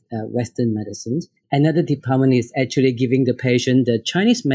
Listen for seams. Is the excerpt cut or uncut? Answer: cut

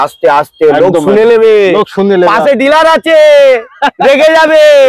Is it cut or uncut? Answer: uncut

